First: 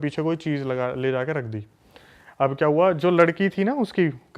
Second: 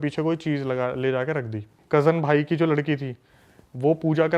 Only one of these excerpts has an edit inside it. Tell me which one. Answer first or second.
second